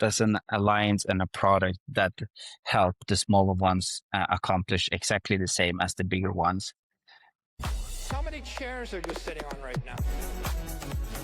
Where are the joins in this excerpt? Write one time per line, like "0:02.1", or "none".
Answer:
0:07.5